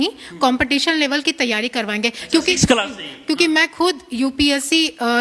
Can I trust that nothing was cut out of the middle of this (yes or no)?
yes